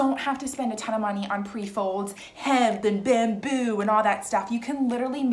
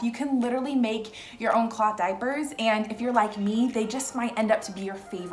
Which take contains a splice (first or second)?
first